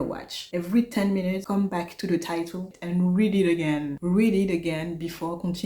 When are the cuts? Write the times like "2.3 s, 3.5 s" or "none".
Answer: 2.8 s